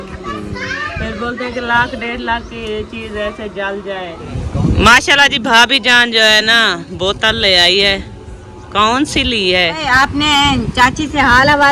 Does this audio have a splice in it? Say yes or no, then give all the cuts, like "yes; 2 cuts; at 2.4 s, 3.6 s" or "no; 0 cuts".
yes; 2 cuts; at 4.3 s, 9.8 s